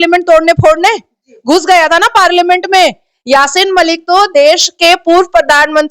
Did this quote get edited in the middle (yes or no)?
no